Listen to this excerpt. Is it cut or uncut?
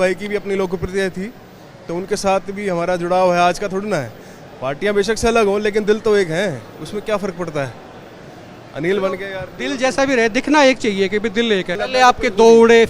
cut